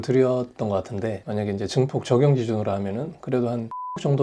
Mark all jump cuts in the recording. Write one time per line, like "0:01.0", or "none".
none